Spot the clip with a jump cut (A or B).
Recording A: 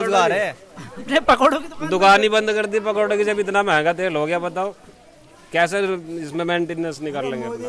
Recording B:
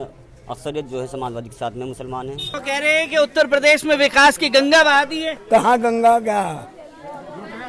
B